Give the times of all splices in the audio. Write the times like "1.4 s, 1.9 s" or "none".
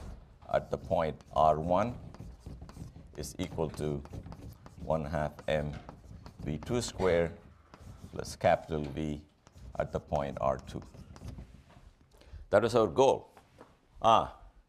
none